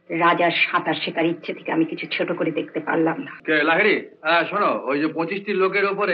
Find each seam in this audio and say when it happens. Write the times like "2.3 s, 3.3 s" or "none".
3.3 s